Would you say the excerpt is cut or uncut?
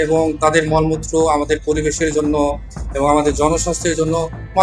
uncut